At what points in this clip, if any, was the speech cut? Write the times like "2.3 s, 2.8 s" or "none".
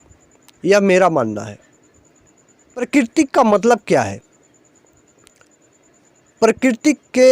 2.9 s